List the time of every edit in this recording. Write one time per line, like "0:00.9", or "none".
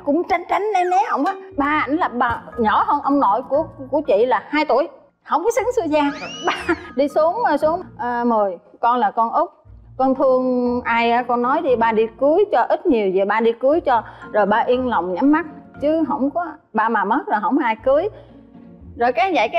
none